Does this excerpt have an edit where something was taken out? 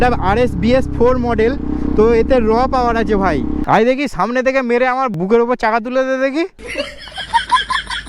yes; 2 cuts; at 3.6 s, 5.1 s

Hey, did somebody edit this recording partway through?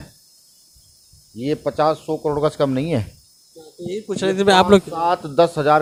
no; 0 cuts

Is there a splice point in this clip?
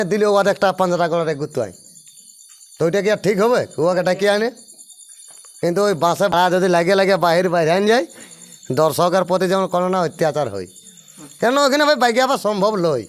yes; 1 cut; at 6.3 s

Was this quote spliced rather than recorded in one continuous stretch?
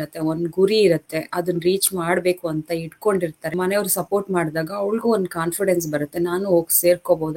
yes; 1 cut; at 3.5 s

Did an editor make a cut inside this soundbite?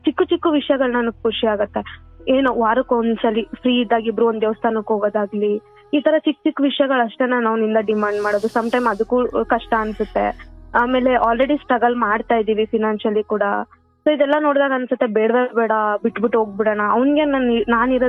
no; 0 cuts

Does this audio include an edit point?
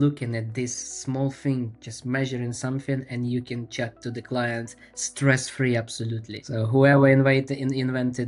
no; 0 cuts

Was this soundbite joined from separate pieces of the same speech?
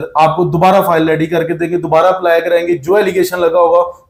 no; 0 cuts

